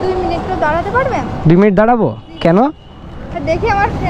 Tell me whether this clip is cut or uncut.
uncut